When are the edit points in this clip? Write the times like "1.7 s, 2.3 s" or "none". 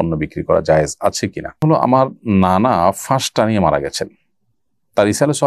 1.6 s